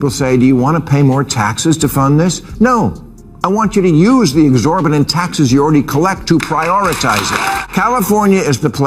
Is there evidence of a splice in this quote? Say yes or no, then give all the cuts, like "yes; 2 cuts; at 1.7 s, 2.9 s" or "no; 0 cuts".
yes; 1 cut; at 7.6 s